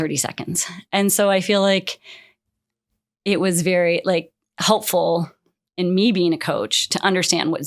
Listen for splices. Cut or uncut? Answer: uncut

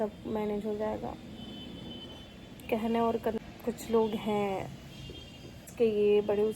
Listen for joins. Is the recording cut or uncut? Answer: cut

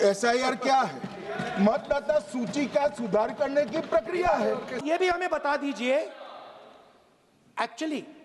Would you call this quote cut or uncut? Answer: cut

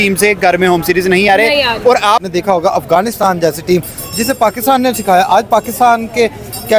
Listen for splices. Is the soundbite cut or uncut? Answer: cut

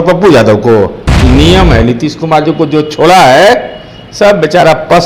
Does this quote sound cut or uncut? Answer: cut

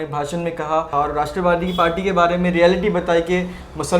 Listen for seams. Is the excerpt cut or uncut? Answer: cut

